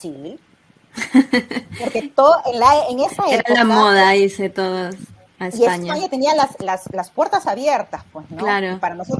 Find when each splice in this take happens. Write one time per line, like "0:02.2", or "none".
none